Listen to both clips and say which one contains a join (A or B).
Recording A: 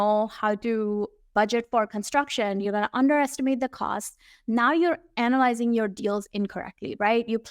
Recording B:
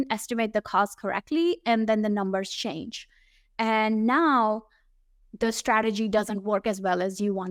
A